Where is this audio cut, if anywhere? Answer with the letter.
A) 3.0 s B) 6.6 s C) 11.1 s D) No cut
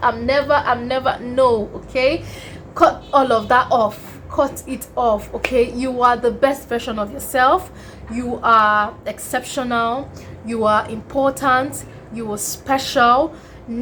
D